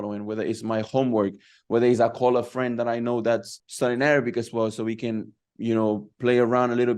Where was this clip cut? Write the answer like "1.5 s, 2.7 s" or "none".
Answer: 3.6 s